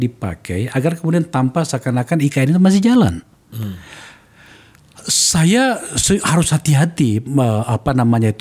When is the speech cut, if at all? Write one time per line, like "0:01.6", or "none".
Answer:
none